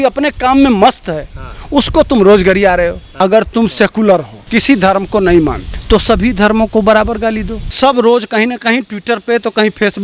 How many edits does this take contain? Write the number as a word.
four